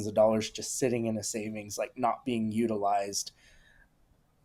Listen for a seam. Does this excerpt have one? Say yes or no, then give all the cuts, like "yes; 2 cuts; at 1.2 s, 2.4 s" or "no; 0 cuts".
no; 0 cuts